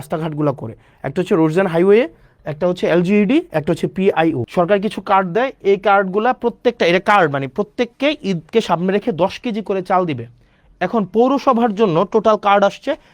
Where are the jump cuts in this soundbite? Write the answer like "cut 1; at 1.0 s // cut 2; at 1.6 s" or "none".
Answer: cut 1; at 4.4 s